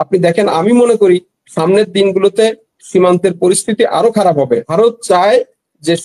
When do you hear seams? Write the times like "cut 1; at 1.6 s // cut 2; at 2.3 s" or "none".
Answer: cut 1; at 4.7 s

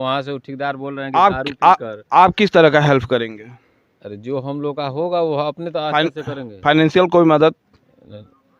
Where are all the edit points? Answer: none

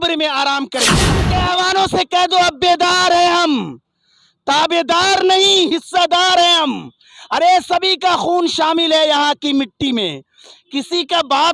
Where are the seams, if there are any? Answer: cut 1; at 1.2 s

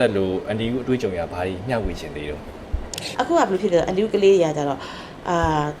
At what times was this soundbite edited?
cut 1; at 3.0 s

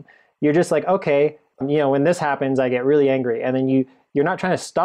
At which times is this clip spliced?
cut 1; at 1.6 s

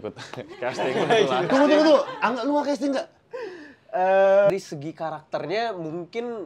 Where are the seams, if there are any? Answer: cut 1; at 1.5 s // cut 2; at 4.5 s

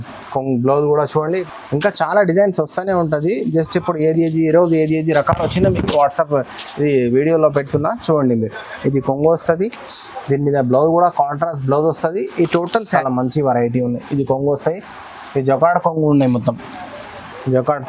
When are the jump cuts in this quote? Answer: cut 1; at 1.4 s // cut 2; at 12.9 s

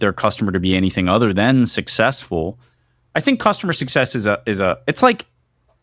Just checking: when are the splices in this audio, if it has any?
cut 1; at 3.0 s

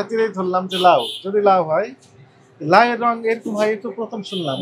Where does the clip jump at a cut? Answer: none

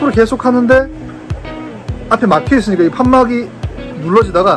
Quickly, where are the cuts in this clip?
none

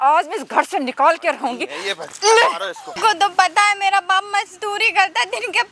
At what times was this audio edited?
cut 1; at 2.9 s

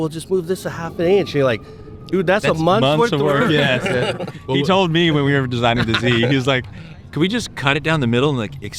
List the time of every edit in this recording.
none

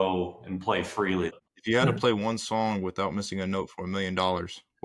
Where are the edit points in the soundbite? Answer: cut 1; at 1.5 s

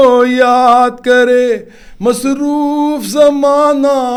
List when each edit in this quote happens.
none

